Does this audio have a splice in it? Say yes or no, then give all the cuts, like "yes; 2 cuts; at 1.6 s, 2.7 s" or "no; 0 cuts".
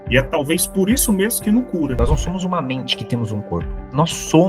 yes; 1 cut; at 1.9 s